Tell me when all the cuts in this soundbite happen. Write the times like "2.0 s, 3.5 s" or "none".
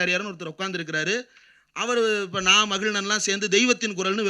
none